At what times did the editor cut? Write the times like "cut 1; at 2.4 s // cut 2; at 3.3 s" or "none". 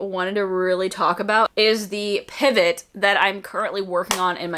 cut 1; at 1.5 s